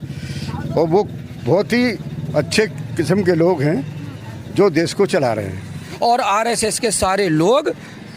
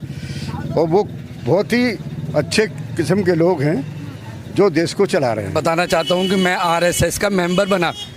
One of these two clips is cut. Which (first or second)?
first